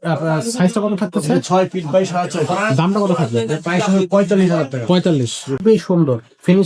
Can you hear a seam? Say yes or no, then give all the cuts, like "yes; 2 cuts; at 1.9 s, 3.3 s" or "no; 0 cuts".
yes; 1 cut; at 5.6 s